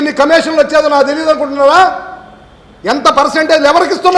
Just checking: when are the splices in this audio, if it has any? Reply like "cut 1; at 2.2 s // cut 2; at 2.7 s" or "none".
none